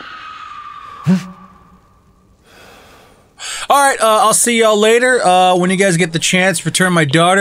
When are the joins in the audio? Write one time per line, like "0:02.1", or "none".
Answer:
none